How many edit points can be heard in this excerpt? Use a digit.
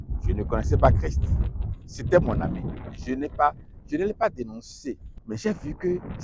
1